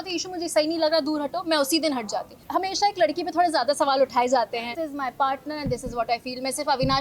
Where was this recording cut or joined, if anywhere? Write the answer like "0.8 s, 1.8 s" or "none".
2.3 s, 4.8 s